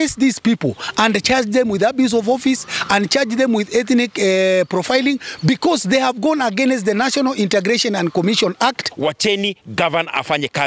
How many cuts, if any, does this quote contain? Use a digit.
1